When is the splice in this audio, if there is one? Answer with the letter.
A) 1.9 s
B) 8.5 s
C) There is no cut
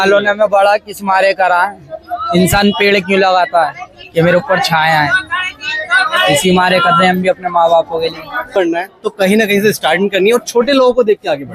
B